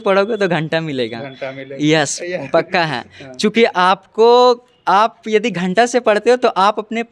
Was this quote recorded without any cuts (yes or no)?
yes